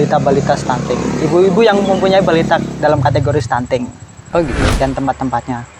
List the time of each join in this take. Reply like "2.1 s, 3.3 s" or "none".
4.7 s